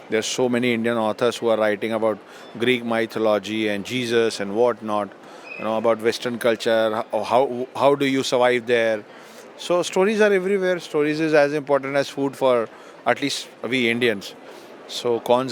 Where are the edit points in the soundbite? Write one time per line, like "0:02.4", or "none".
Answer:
none